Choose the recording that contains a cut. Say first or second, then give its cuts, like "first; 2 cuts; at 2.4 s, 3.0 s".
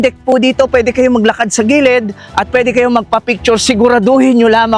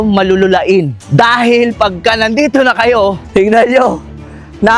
second; 2 cuts; at 1.0 s, 3.2 s